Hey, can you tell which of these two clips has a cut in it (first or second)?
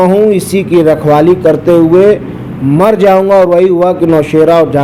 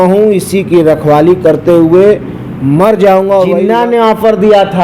second